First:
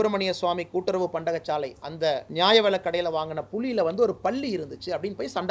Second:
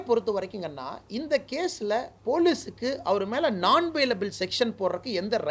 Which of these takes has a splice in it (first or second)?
first